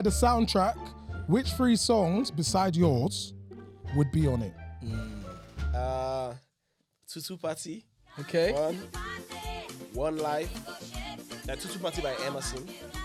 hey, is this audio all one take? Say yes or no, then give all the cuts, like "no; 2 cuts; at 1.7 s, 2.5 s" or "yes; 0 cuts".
yes; 0 cuts